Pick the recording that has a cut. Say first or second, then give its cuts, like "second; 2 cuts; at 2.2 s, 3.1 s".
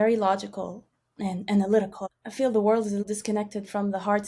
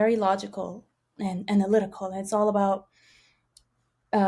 first; 2 cuts; at 2.1 s, 3.0 s